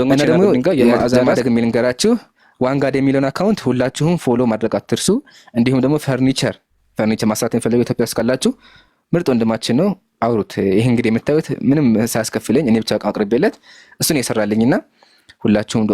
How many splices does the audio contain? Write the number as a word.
one